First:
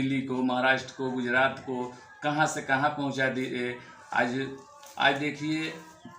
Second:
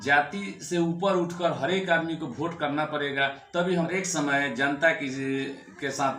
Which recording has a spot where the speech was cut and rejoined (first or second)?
second